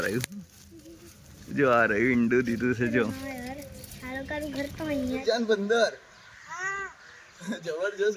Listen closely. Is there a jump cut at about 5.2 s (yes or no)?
yes